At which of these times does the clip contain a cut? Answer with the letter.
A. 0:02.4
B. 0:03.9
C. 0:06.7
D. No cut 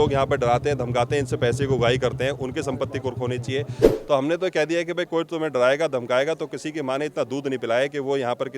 B